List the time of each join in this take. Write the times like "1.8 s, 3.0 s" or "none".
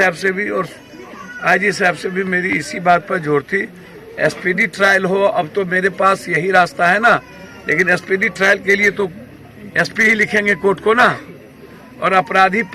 none